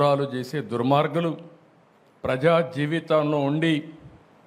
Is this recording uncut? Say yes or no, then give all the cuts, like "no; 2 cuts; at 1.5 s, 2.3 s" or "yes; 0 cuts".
yes; 0 cuts